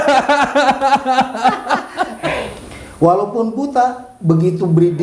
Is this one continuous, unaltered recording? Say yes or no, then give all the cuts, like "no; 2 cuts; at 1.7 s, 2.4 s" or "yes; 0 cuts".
no; 1 cut; at 2.2 s